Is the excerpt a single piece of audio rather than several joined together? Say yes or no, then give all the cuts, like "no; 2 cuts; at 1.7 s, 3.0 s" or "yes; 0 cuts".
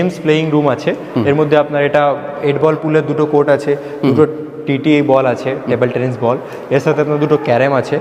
yes; 0 cuts